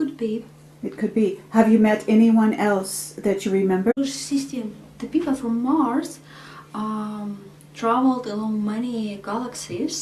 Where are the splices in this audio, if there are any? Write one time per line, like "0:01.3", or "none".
none